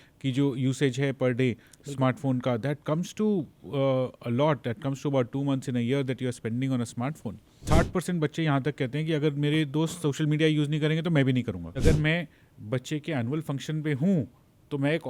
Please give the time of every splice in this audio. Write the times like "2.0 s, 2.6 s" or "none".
7.6 s, 11.8 s